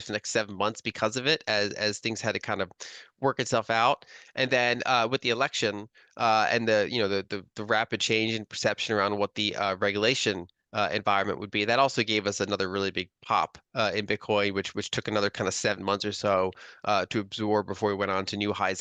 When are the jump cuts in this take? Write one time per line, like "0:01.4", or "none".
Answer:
none